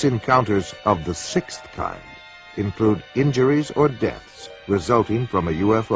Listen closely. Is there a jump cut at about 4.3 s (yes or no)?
no